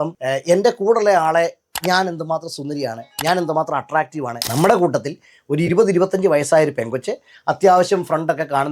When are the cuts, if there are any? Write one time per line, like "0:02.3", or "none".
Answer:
0:04.4